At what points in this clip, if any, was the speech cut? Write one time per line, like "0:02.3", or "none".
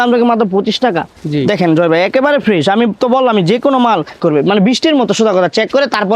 0:01.1
0:04.1